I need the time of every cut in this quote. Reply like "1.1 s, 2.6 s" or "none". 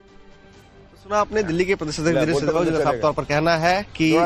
1.1 s